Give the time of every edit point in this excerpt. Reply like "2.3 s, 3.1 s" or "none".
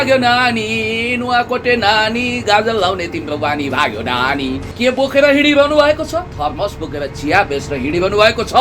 4.6 s